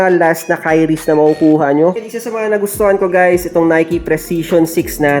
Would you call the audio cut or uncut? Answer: cut